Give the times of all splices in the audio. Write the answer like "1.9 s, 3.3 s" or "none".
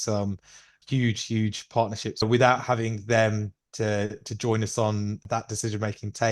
2.2 s